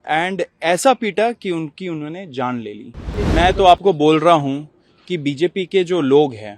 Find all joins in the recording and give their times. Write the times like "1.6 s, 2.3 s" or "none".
3.1 s